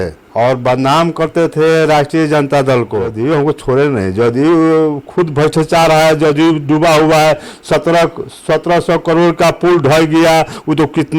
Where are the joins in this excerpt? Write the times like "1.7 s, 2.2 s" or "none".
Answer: 3.1 s